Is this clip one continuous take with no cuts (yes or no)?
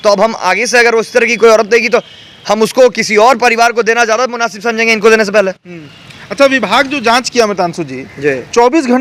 yes